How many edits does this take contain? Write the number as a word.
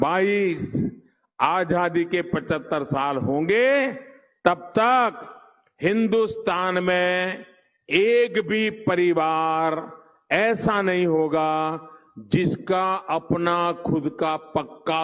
zero